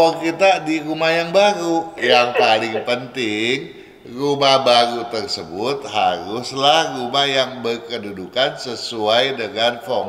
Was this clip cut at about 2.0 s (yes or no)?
yes